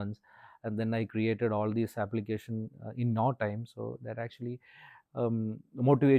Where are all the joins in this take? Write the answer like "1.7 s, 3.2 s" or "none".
none